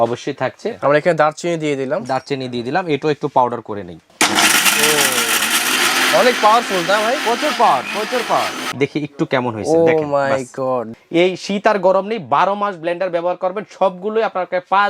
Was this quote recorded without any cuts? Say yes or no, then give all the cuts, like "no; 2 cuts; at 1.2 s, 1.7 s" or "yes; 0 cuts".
no; 4 cuts; at 0.8 s, 5.8 s, 8.6 s, 10.9 s